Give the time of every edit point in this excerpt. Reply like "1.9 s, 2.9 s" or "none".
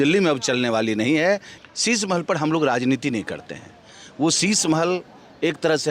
1.5 s